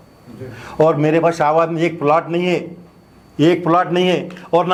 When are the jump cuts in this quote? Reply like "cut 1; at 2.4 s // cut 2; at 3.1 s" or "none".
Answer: none